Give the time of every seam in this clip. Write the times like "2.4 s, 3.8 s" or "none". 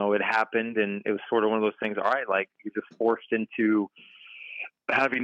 none